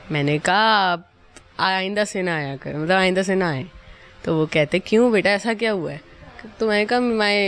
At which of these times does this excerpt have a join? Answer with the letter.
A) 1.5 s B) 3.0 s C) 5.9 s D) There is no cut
D